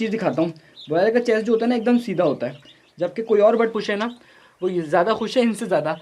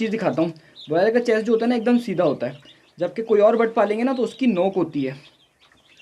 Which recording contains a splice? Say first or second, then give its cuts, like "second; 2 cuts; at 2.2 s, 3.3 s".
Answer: first; 1 cut; at 3.7 s